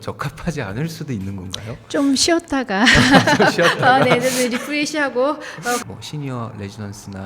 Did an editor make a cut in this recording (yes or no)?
yes